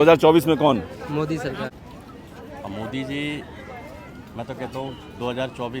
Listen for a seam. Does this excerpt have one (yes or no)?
yes